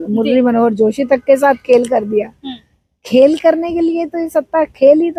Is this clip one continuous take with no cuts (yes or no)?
yes